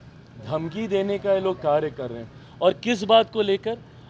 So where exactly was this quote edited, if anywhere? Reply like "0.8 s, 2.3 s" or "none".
none